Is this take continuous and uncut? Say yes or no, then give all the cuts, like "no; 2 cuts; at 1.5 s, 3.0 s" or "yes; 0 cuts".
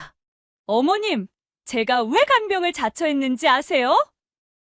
yes; 0 cuts